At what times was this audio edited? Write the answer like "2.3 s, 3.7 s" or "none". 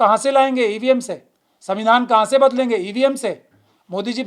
none